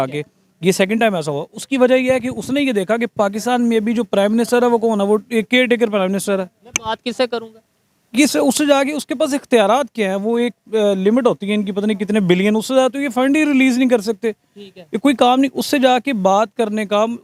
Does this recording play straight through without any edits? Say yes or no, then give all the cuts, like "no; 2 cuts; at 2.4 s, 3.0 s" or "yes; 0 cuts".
yes; 0 cuts